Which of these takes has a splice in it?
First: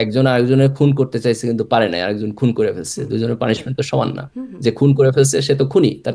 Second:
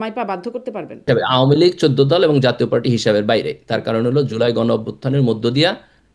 second; 1 cut; at 1.1 s

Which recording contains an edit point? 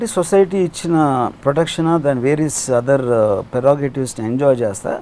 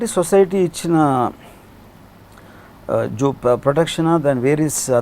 first; 1 cut; at 1.4 s

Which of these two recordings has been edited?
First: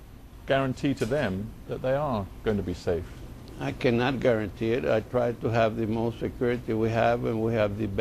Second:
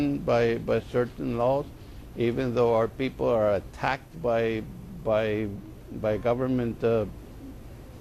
second; 1 cut; at 4.5 s

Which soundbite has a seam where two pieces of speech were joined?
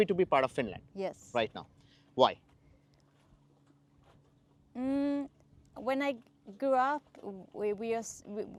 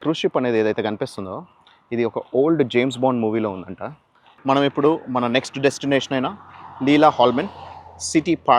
second; 1 cut; at 4.3 s

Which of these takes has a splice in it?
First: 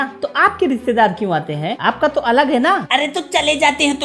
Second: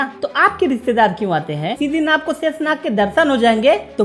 second; 1 cut; at 1.8 s

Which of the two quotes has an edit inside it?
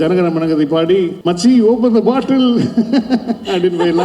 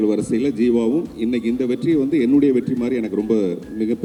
first; 1 cut; at 1.2 s

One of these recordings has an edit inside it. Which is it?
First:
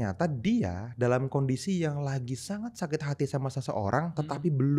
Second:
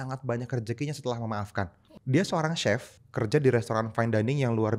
second; 2 cuts; at 1.9 s, 3.0 s

